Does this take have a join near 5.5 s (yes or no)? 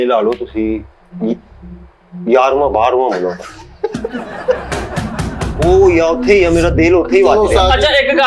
no